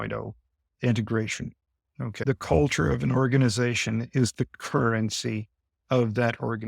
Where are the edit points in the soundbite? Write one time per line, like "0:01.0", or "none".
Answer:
0:02.2